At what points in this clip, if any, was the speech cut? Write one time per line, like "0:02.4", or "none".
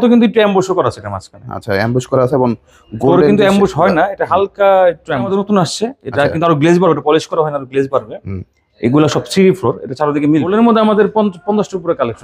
0:05.3
0:10.5